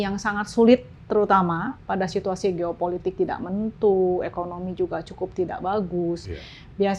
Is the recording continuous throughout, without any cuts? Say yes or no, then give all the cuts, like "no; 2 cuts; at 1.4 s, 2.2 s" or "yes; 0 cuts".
yes; 0 cuts